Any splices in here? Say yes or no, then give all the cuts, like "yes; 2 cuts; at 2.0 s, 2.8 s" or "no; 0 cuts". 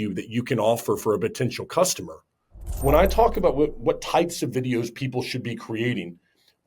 yes; 1 cut; at 2.7 s